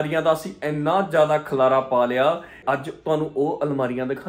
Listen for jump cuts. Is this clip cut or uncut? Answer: cut